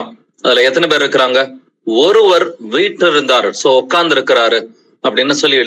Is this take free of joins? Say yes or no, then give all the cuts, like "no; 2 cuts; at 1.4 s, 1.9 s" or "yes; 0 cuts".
yes; 0 cuts